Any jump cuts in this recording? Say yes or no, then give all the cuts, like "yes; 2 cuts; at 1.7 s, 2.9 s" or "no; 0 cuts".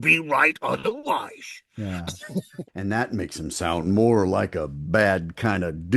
yes; 1 cut; at 2.6 s